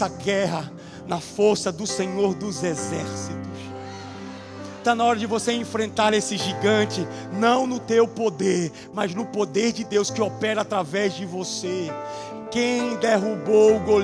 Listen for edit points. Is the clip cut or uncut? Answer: uncut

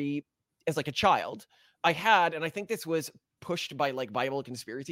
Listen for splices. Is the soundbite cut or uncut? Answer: uncut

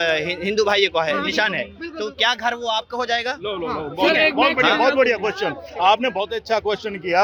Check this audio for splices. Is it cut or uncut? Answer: uncut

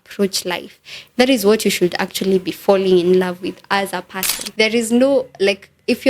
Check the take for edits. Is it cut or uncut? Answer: cut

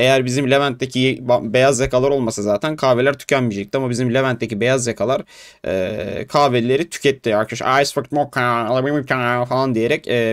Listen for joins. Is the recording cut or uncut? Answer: uncut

